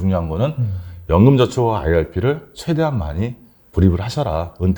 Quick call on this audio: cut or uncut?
uncut